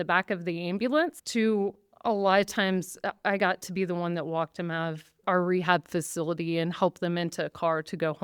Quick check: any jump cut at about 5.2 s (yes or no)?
yes